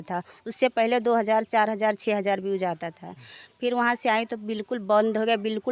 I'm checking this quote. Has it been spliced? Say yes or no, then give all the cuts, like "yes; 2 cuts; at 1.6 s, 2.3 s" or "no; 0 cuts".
no; 0 cuts